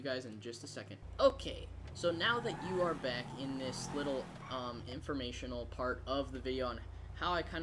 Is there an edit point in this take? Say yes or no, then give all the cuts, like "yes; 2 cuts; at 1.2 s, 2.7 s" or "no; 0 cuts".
no; 0 cuts